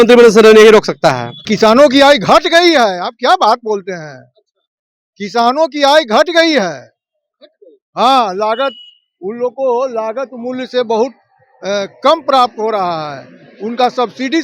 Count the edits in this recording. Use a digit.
1